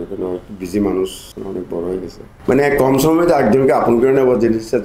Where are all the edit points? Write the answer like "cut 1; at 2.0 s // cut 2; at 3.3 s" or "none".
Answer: cut 1; at 1.2 s // cut 2; at 2.3 s